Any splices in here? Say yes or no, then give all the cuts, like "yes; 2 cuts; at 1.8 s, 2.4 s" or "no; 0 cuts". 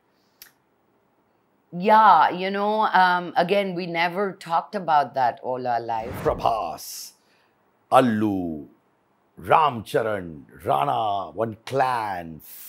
yes; 1 cut; at 6.1 s